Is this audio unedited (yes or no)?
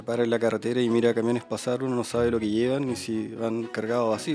yes